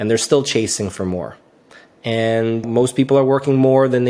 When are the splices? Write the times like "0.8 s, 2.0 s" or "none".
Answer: 2.7 s